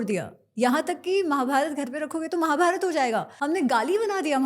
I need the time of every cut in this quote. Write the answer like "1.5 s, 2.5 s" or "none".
3.3 s